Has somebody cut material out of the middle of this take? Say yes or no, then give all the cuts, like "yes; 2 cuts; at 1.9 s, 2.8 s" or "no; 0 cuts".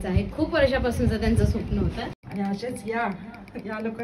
yes; 1 cut; at 2.2 s